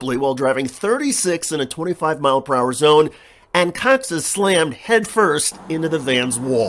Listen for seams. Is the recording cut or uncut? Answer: uncut